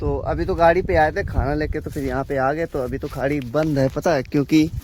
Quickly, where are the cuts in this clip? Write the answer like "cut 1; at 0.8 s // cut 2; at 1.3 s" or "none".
none

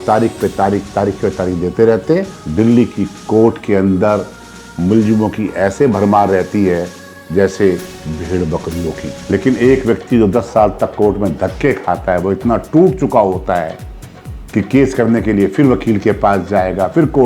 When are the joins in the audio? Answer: cut 1; at 2.4 s // cut 2; at 9.2 s

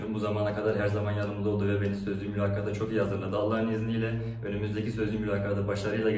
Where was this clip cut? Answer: none

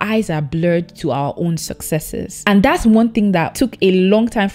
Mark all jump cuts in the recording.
none

